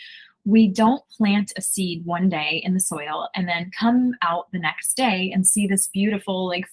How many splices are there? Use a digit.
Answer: 0